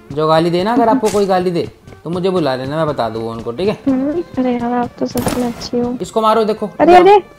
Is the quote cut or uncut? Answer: cut